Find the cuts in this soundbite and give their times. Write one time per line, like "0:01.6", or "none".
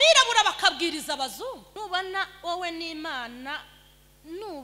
0:01.7